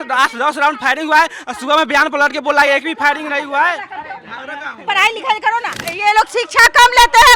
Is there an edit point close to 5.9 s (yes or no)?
yes